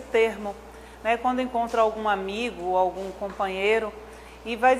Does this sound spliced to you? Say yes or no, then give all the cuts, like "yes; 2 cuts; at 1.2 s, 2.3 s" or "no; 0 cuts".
no; 0 cuts